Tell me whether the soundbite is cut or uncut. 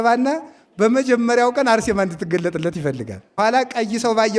cut